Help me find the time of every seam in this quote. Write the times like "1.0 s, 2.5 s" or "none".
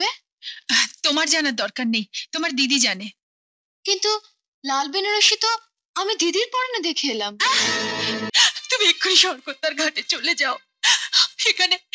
8.3 s